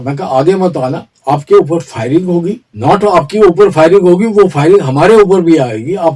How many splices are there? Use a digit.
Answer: 2